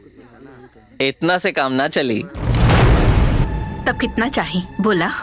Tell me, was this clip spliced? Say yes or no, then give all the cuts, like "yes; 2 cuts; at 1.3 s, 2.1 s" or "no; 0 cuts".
yes; 1 cut; at 3.4 s